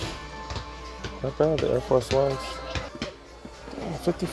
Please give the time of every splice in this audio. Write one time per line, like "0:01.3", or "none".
0:02.9